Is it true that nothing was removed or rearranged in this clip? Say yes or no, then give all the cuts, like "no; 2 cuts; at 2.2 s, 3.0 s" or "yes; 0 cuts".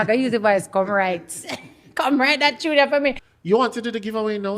no; 1 cut; at 3.3 s